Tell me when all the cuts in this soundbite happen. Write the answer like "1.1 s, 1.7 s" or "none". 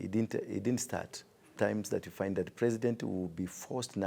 1.6 s